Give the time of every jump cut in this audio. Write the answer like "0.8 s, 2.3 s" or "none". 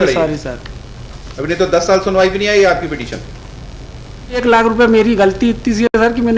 4.4 s